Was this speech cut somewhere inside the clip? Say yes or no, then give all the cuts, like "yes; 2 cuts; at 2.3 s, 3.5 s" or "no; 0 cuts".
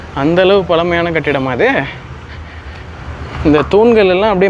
no; 0 cuts